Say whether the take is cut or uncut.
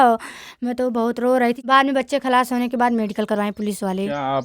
cut